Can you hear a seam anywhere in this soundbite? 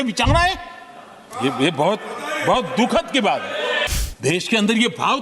yes; 1 cut; at 3.9 s

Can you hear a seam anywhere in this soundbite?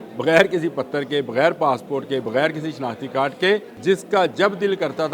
yes; 1 cut; at 3.7 s

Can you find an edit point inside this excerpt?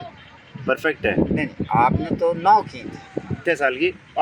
yes; 1 cut; at 3.2 s

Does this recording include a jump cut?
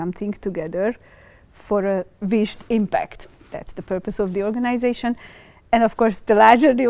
no; 0 cuts

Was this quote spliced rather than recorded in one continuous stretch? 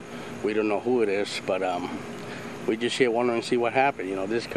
no; 0 cuts

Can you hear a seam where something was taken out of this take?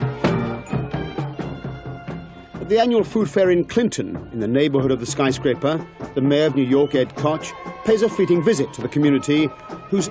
yes; 1 cut; at 5.8 s

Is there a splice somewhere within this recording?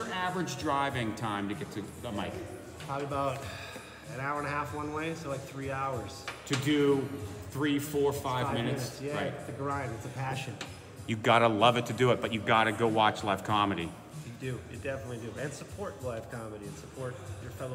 no; 0 cuts

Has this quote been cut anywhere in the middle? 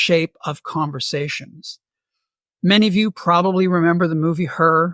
no; 0 cuts

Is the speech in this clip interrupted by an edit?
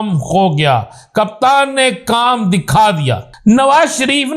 yes; 1 cut; at 3.3 s

